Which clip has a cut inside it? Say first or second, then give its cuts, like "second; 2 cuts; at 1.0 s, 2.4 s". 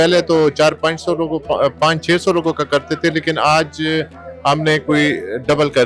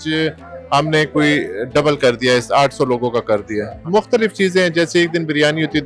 second; 1 cut; at 3.7 s